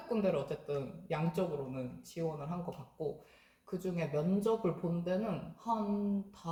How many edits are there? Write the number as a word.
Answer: zero